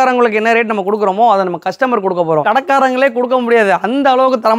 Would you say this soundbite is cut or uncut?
cut